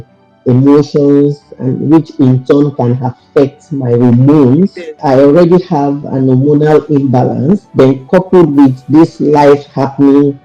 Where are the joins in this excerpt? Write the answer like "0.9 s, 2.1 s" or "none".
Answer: 5.0 s, 7.7 s